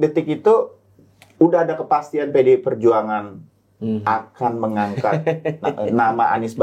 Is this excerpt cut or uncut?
uncut